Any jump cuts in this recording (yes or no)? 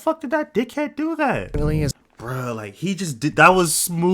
yes